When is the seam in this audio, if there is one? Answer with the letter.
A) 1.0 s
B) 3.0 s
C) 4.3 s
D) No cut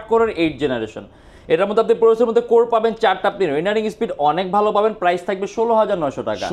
D